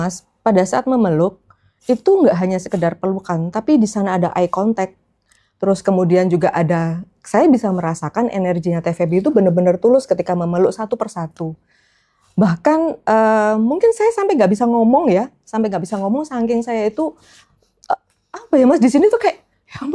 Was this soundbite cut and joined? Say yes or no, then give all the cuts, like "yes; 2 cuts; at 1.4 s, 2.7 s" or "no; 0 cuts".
no; 0 cuts